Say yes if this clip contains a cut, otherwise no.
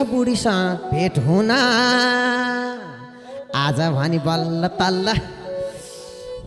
no